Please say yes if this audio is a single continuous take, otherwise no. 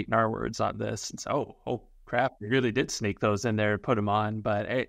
yes